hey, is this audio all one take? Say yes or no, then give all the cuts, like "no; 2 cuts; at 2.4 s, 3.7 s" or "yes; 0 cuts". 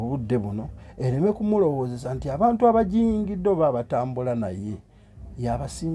yes; 0 cuts